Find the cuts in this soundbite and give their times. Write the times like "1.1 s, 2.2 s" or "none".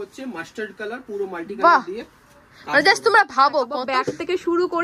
3.9 s